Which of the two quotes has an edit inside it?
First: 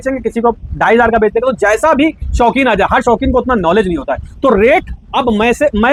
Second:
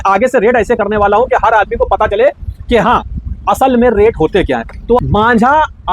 second; 1 cut; at 5.0 s

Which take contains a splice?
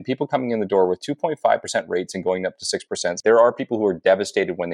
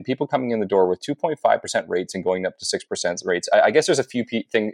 first; 1 cut; at 3.2 s

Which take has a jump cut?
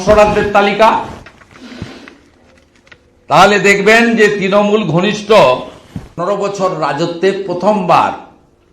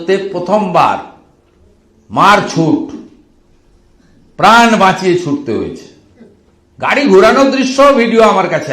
first; 1 cut; at 6.2 s

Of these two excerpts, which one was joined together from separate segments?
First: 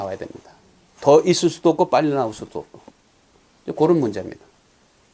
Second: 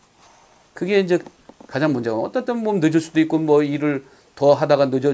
first; 1 cut; at 3.9 s

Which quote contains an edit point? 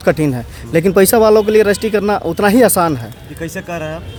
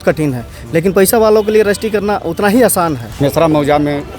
second; 1 cut; at 3.1 s

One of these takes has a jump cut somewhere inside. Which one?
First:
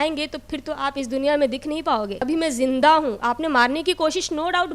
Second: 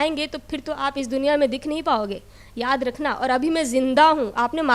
first; 1 cut; at 2.2 s

